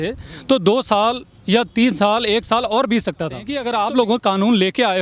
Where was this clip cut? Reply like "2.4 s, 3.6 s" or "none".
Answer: 3.6 s